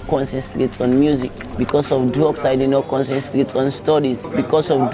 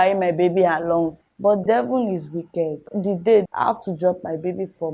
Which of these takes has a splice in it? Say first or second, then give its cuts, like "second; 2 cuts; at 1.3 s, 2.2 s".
second; 1 cut; at 1.2 s